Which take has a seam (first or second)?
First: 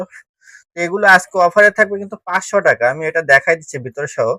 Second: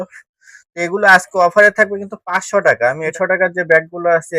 second